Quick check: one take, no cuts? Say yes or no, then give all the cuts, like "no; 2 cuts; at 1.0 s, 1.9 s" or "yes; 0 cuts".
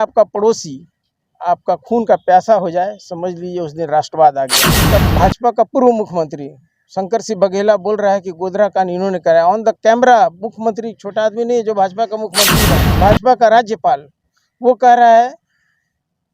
no; 2 cuts; at 4.8 s, 12.6 s